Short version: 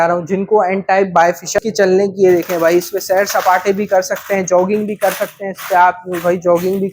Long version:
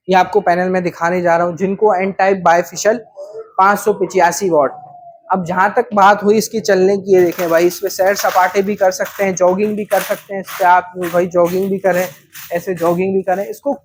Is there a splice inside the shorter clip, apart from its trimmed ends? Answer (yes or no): yes